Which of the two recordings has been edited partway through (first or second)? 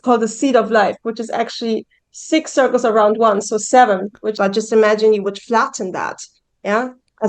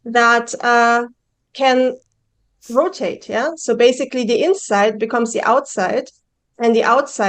first